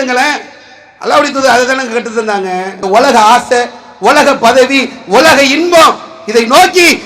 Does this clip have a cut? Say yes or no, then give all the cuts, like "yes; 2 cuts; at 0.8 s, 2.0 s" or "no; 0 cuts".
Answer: yes; 1 cut; at 2.7 s